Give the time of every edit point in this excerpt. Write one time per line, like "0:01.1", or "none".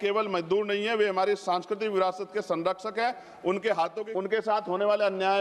0:04.0